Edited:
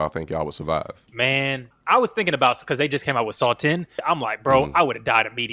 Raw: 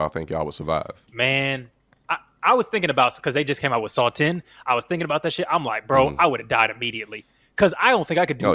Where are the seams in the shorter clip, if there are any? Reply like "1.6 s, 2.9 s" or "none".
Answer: 1.7 s, 4.0 s